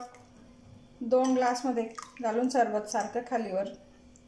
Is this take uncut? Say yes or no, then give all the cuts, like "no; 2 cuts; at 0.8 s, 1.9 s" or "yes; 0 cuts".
yes; 0 cuts